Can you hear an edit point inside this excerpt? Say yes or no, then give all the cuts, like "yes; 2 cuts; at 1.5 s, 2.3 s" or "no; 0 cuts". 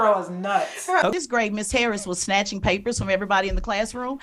yes; 1 cut; at 1.1 s